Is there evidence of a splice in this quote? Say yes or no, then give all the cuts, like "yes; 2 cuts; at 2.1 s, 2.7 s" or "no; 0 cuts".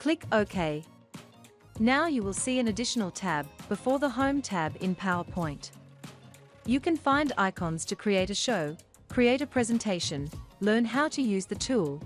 yes; 1 cut; at 1.2 s